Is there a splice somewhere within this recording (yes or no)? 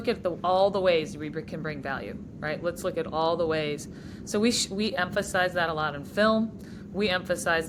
no